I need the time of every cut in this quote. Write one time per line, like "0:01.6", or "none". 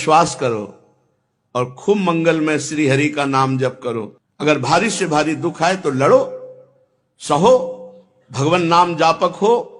0:04.1